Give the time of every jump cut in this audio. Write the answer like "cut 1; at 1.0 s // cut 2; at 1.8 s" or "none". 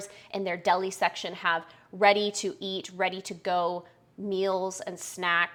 none